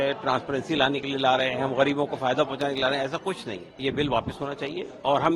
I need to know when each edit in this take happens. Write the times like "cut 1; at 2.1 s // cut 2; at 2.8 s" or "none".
cut 1; at 3.8 s